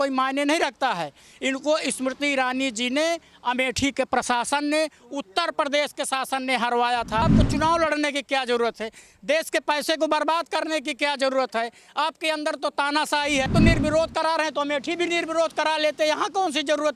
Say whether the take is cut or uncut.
cut